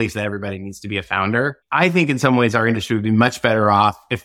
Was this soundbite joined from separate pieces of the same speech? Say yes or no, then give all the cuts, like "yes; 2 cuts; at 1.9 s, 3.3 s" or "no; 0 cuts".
yes; 1 cut; at 1.7 s